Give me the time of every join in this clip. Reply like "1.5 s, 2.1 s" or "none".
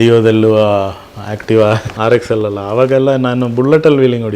1.9 s